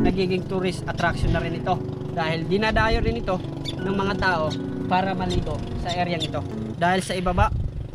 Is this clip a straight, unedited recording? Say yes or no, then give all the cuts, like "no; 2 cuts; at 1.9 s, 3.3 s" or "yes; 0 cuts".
yes; 0 cuts